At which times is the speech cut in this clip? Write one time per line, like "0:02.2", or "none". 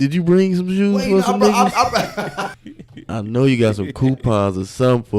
0:02.4